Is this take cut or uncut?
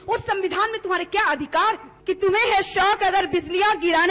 cut